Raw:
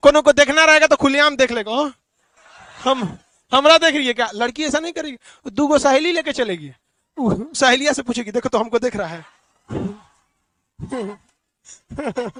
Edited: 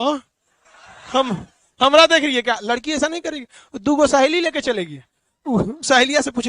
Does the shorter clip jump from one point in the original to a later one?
no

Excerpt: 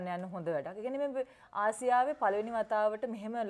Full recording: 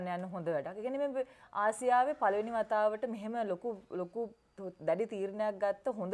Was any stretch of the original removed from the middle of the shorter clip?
no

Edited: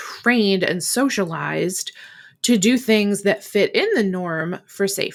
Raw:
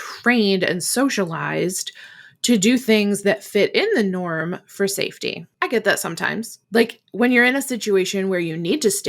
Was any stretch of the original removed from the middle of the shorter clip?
no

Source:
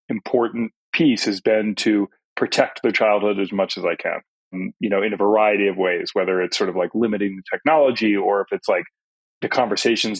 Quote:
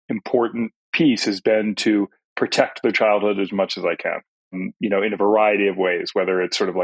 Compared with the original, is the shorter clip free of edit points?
yes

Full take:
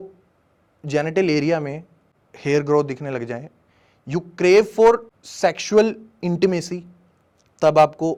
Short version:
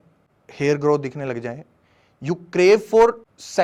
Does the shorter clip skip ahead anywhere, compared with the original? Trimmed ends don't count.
no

